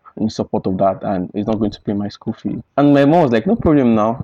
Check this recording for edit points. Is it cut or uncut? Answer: uncut